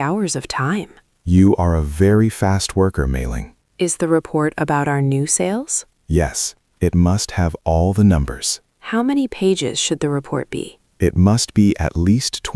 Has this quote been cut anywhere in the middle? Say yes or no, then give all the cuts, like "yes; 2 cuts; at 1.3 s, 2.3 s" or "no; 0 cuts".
no; 0 cuts